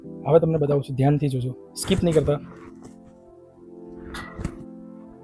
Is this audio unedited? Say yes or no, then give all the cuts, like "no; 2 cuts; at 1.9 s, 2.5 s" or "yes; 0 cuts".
yes; 0 cuts